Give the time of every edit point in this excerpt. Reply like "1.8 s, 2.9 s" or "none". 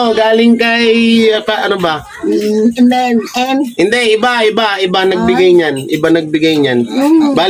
none